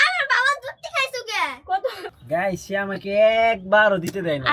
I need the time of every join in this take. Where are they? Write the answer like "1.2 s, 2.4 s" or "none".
2.0 s